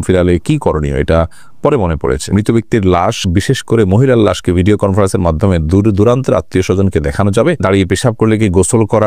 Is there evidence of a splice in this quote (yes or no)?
yes